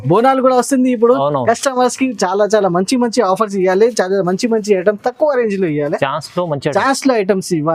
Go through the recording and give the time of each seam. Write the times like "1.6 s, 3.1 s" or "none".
none